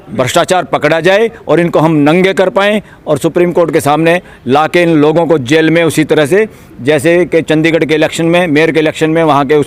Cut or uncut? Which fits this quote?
uncut